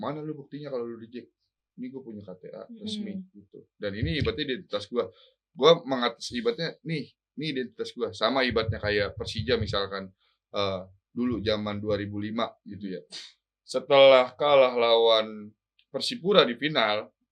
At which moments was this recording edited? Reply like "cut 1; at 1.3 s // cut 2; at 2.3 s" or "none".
none